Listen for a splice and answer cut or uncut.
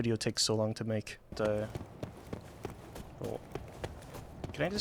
cut